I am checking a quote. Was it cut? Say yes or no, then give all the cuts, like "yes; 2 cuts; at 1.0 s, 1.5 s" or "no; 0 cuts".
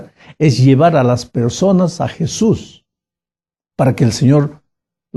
yes; 1 cut; at 2.7 s